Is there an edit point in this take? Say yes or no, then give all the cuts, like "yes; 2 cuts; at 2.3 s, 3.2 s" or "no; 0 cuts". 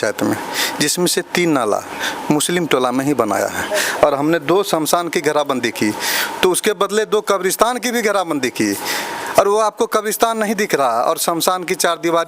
yes; 1 cut; at 3.7 s